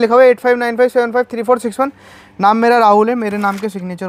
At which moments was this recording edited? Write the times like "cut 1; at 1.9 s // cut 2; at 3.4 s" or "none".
none